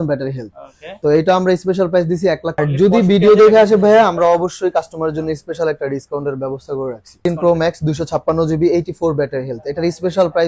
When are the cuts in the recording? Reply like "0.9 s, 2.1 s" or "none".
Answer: 2.6 s, 7.2 s

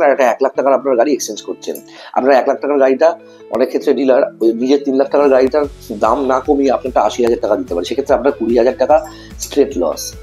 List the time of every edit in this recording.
none

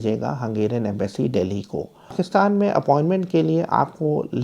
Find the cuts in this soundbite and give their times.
2.1 s

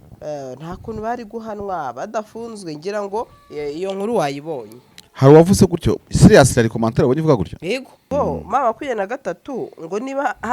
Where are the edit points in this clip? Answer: 7.9 s

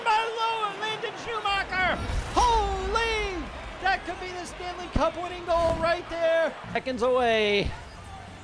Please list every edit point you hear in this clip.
6.8 s

